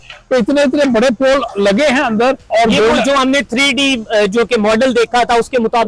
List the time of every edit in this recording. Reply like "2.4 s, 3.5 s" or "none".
2.4 s